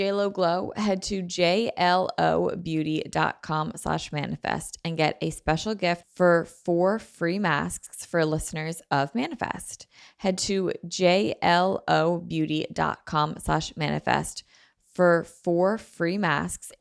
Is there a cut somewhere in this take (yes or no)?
no